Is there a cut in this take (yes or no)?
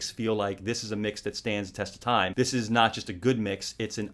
no